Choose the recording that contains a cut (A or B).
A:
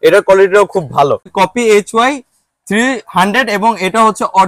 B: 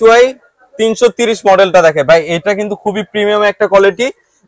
A